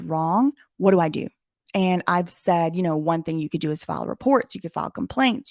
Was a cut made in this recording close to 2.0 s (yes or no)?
no